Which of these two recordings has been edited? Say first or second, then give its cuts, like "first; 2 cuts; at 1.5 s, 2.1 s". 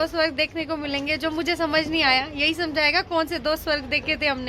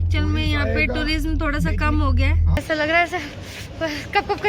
second; 1 cut; at 2.6 s